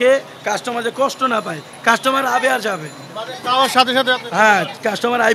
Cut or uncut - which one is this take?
uncut